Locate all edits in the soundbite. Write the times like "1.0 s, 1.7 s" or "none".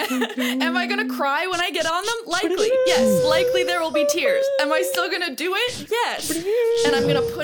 none